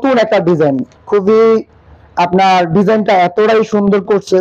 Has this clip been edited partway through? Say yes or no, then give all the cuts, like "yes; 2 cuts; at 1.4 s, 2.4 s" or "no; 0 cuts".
no; 0 cuts